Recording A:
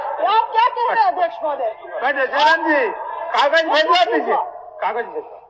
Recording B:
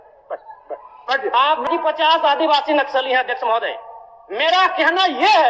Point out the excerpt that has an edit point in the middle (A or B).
B